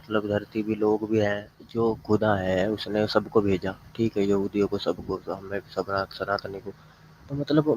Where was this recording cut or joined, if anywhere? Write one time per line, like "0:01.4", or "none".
0:01.6